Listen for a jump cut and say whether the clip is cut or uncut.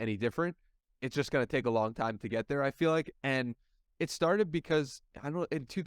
uncut